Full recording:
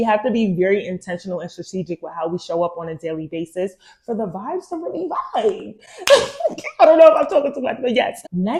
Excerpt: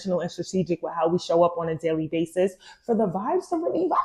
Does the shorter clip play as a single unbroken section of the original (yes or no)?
yes